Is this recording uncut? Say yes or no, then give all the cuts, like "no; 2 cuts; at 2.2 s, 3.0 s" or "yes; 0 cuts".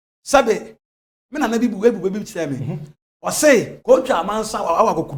yes; 0 cuts